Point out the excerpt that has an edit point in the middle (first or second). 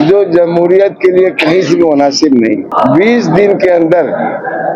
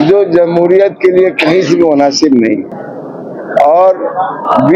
first